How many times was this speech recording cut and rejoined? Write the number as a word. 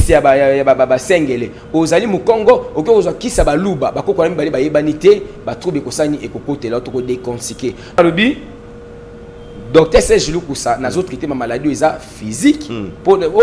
one